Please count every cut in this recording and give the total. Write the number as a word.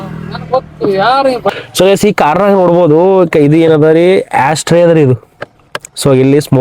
one